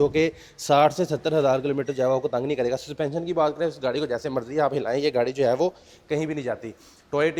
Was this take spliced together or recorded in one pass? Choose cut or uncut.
uncut